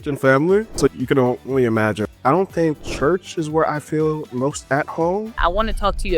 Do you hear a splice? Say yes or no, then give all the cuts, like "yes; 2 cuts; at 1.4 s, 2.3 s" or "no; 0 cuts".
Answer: yes; 4 cuts; at 1.0 s, 2.1 s, 2.9 s, 5.4 s